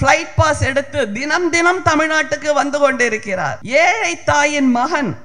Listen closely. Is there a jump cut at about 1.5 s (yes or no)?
no